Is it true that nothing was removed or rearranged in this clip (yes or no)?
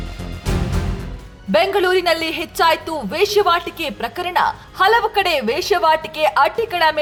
yes